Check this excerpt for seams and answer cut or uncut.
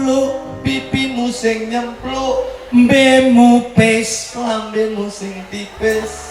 uncut